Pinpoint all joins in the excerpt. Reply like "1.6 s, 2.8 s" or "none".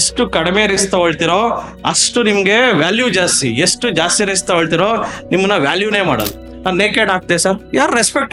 none